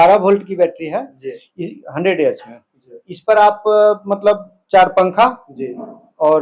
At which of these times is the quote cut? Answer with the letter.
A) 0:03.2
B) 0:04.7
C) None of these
C